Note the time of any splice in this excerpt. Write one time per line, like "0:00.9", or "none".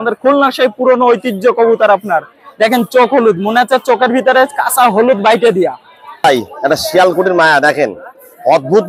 0:06.1